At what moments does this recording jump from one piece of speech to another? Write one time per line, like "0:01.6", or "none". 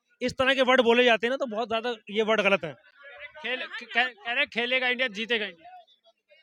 none